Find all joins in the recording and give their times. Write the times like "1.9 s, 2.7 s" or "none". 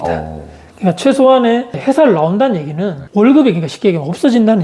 none